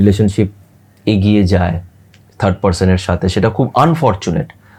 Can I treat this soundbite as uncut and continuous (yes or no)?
yes